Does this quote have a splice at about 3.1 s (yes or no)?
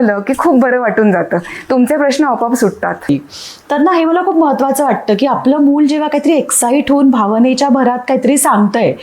yes